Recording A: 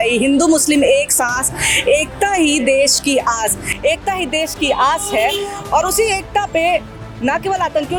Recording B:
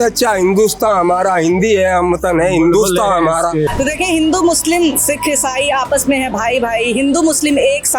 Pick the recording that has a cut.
B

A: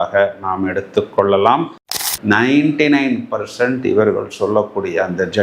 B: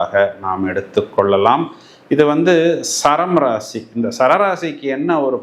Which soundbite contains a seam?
A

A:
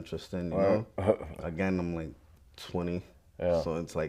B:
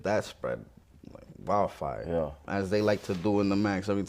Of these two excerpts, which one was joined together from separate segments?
B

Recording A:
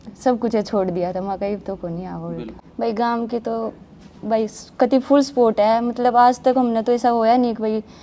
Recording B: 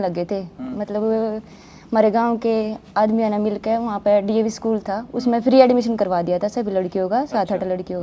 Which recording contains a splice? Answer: A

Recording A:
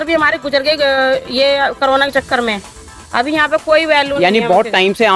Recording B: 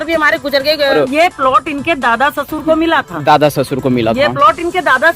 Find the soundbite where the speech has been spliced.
B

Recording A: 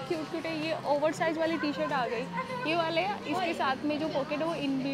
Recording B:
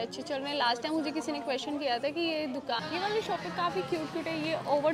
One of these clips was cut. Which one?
B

